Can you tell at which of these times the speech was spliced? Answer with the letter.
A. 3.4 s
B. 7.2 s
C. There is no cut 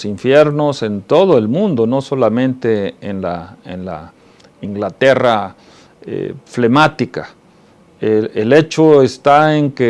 A